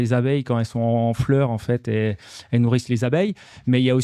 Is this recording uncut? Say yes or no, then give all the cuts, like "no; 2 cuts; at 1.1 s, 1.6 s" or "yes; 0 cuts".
yes; 0 cuts